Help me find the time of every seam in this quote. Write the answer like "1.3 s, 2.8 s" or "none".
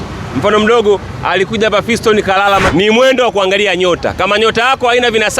2.7 s